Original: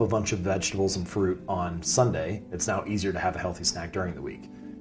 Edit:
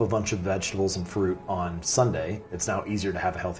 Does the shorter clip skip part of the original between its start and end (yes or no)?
no